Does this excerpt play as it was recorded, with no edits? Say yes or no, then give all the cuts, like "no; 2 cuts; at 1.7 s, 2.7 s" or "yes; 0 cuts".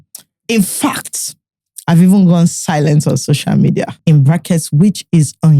no; 1 cut; at 3.9 s